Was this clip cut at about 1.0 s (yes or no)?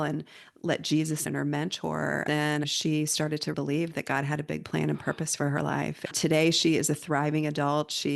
no